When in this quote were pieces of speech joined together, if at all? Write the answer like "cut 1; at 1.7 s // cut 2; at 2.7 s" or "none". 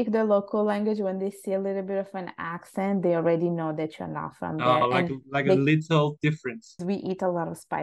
cut 1; at 6.8 s